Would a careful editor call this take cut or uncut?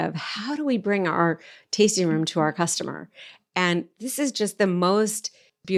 uncut